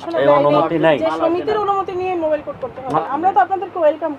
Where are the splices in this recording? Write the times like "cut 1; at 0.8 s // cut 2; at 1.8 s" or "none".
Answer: cut 1; at 2.9 s